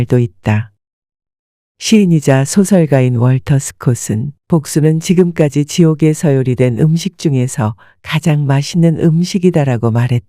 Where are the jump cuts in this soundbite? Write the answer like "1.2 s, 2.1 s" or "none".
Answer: 1.2 s